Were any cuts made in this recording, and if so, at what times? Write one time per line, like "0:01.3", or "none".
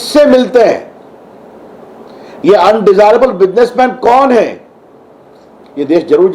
none